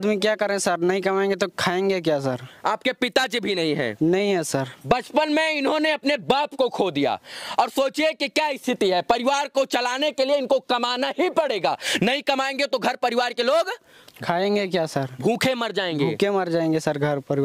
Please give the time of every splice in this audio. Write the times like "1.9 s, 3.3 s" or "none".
none

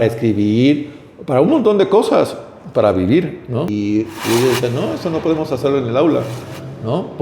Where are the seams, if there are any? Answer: 3.7 s

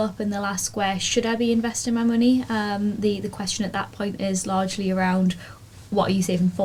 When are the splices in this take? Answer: none

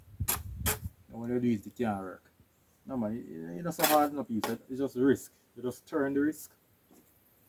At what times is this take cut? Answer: none

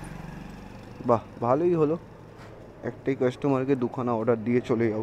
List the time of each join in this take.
none

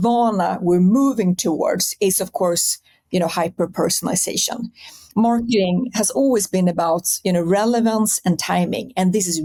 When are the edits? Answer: none

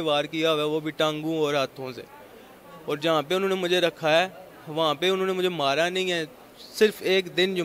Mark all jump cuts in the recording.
none

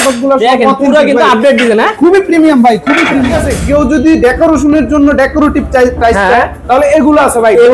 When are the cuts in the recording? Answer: 3.5 s

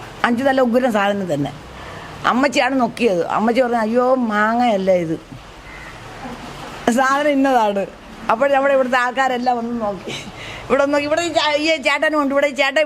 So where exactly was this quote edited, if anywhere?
none

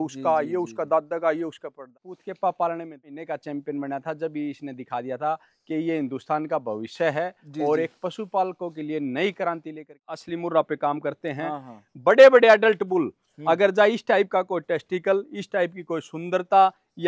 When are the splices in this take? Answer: 1.9 s, 3.2 s, 9.9 s

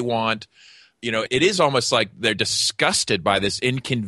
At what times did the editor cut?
1.3 s

